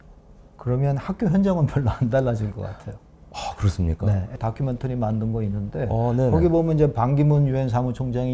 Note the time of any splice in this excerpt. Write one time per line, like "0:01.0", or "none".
0:04.3